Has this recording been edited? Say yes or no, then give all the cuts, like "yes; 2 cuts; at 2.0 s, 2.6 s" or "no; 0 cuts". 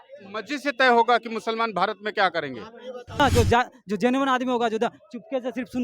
yes; 1 cut; at 3.2 s